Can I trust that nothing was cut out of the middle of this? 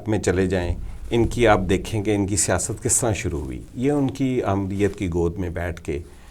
yes; 0 cuts

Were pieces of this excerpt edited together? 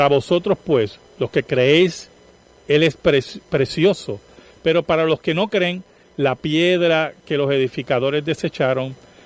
no; 0 cuts

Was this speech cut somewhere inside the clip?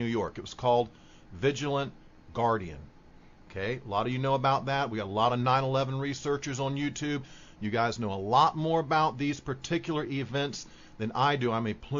no; 0 cuts

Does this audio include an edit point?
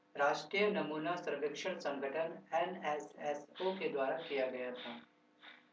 yes; 1 cut; at 1.0 s

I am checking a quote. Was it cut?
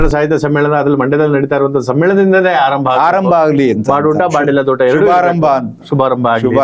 no; 0 cuts

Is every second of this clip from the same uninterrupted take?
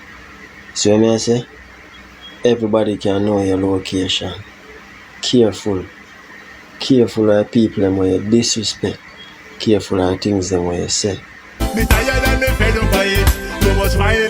no; 1 cut; at 11.6 s

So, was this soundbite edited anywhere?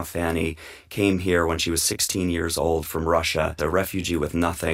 yes; 1 cut; at 3.6 s

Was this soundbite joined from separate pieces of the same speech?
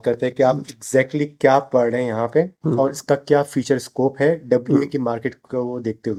no; 0 cuts

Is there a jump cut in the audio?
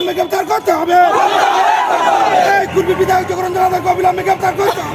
no; 0 cuts

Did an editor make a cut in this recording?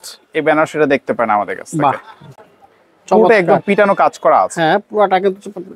no; 0 cuts

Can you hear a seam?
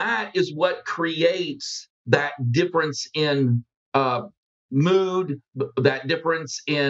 no; 0 cuts

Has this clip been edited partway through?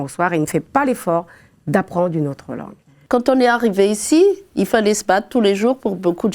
yes; 1 cut; at 3.0 s

